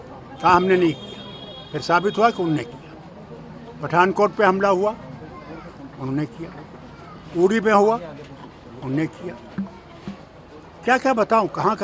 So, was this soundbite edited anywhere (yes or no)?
no